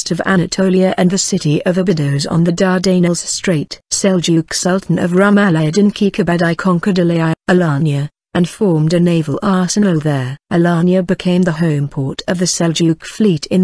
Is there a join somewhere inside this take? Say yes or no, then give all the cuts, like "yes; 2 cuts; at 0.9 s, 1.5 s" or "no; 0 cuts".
no; 0 cuts